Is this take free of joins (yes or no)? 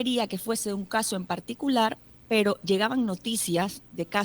yes